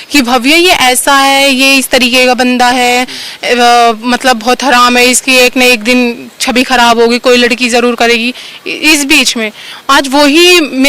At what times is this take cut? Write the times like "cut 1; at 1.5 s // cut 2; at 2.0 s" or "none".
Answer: none